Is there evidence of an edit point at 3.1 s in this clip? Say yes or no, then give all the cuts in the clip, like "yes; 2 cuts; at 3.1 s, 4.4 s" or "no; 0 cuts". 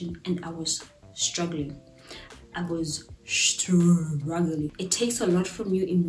no; 1 cut; at 4.7 s